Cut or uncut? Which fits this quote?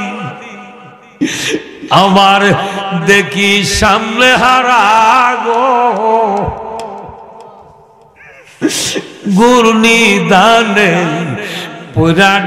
uncut